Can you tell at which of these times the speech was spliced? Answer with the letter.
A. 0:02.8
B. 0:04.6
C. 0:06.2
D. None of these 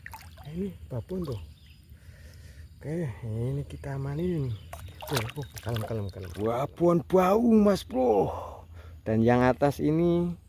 C